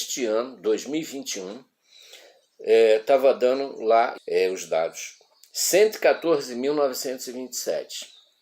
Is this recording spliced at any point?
yes; 1 cut; at 4.2 s

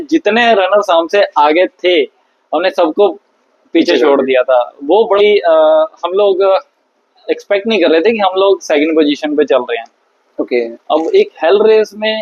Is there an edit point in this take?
yes; 2 cuts; at 5.2 s, 10.8 s

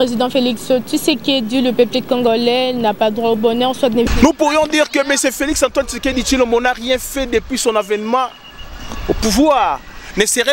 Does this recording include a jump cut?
no; 0 cuts

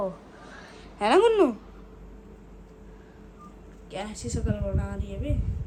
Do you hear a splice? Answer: no; 0 cuts

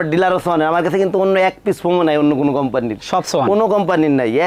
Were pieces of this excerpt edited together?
no; 0 cuts

